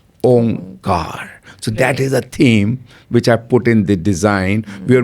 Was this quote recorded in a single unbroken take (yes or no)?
yes